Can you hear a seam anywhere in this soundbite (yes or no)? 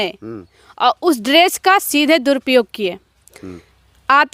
no